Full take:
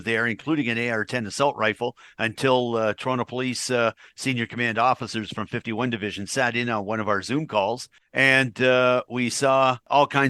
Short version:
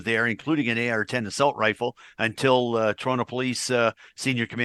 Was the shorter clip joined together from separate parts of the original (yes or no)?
no